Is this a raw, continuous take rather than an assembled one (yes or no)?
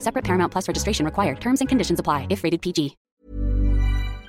no